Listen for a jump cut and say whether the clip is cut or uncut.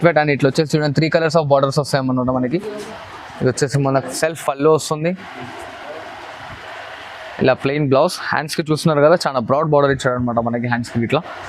uncut